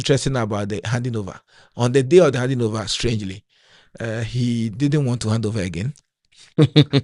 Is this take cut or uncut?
uncut